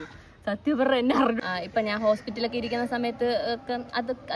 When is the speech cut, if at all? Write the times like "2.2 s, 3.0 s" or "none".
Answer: 1.4 s